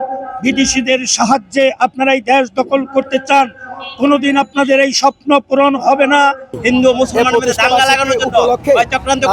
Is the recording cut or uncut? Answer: cut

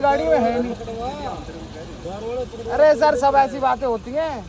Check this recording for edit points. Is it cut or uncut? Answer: uncut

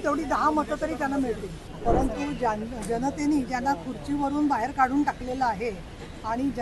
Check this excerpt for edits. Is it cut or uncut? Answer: cut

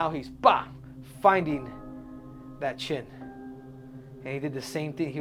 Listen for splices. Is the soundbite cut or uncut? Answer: uncut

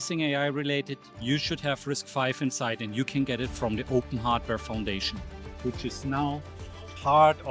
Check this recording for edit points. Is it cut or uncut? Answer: uncut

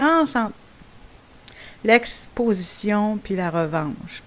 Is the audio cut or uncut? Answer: cut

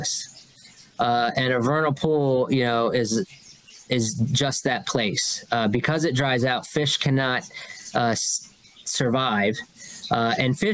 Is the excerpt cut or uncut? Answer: uncut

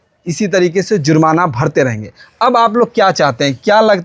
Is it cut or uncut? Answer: uncut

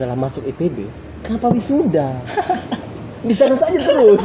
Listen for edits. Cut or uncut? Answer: uncut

